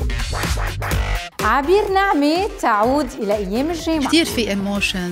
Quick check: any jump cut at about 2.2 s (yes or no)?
no